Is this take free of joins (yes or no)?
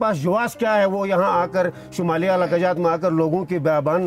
yes